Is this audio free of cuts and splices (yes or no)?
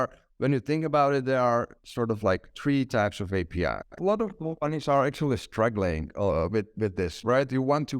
no